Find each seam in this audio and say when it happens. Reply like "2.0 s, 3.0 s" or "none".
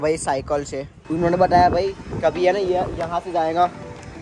0.9 s